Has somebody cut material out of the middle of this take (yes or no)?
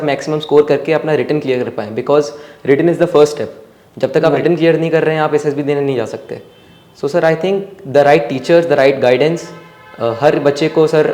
no